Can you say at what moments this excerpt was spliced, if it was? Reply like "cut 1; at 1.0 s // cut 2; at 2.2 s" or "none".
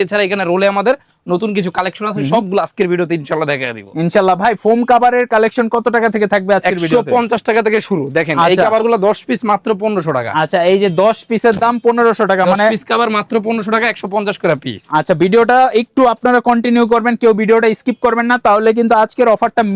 none